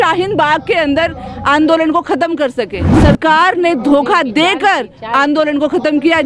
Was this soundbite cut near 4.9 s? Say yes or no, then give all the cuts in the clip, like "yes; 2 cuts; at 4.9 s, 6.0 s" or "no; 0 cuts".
no; 1 cut; at 2.9 s